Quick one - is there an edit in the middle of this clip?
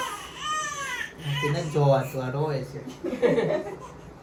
no; 0 cuts

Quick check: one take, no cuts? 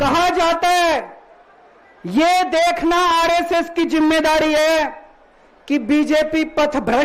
yes; 0 cuts

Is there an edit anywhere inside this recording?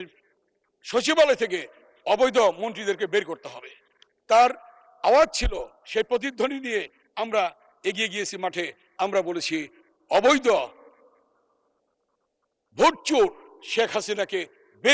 no; 0 cuts

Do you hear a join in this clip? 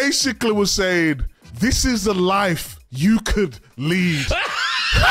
no; 0 cuts

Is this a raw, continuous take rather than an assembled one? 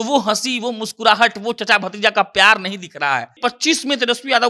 no; 1 cut; at 3.3 s

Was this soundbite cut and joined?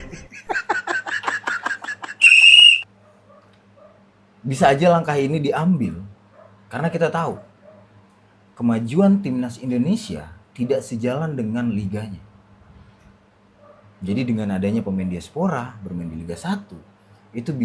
yes; 1 cut; at 2.8 s

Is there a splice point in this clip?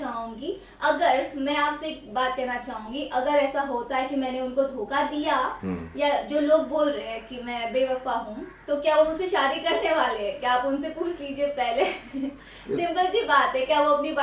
no; 0 cuts

